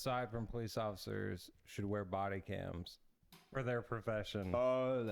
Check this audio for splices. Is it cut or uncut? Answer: uncut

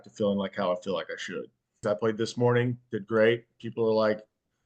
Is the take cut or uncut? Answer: cut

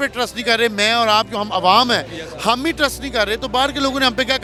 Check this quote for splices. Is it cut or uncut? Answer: uncut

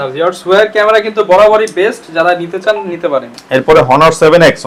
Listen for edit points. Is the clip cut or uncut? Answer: uncut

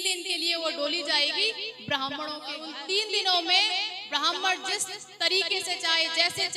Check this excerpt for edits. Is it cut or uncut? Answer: cut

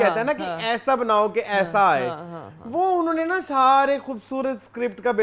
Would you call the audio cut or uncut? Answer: uncut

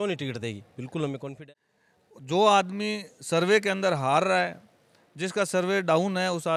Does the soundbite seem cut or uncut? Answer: cut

